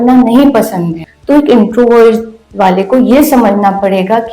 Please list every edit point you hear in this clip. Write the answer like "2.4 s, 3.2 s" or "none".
1.0 s